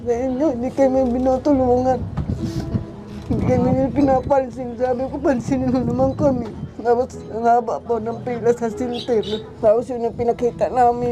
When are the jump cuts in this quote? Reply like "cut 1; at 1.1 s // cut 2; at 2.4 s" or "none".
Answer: cut 1; at 9.5 s